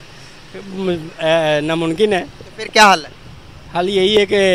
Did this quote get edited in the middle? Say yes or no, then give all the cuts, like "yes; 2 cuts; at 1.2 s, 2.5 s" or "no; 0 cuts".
no; 0 cuts